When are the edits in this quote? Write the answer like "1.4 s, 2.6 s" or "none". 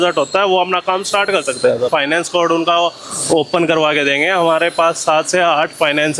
1.9 s